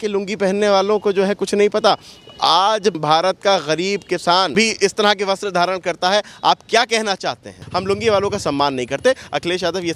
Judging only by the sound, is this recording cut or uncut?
cut